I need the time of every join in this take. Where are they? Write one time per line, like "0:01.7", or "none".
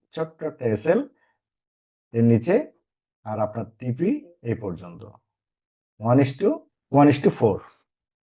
0:06.7